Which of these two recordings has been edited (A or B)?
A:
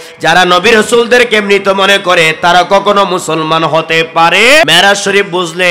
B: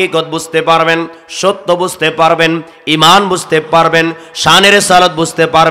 A